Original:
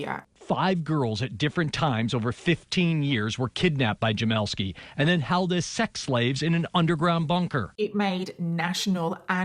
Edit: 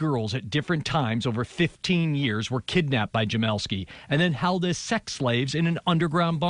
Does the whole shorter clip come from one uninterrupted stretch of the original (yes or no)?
yes